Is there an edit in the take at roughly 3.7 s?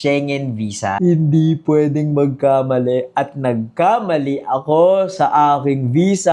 no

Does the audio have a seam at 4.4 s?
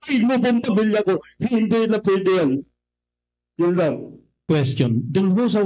yes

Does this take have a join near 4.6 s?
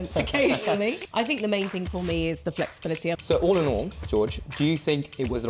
no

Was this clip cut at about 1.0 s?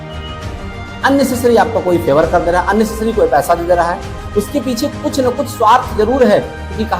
yes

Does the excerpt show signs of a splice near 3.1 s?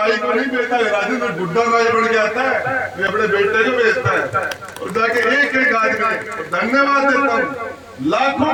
no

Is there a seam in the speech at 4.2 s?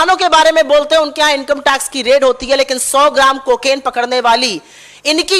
no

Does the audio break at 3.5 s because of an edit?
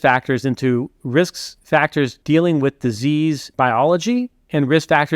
yes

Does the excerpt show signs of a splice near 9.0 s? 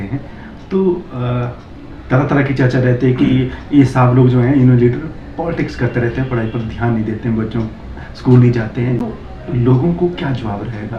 yes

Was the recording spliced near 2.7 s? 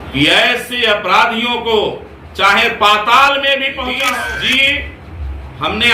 no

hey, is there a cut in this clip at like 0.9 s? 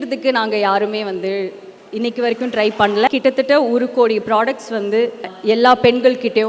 no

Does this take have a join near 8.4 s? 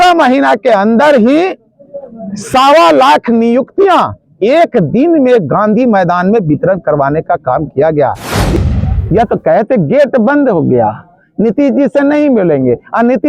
yes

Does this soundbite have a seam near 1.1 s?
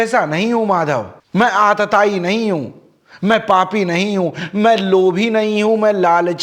yes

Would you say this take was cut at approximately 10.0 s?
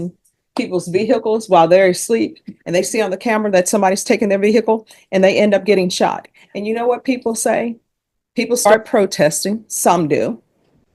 no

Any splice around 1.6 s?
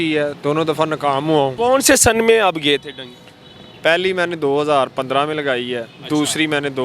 yes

